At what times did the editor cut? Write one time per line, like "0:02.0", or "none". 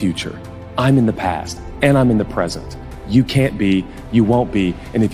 none